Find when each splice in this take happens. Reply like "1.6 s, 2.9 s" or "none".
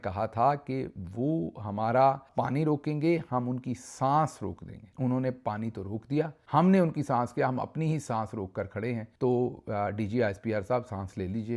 none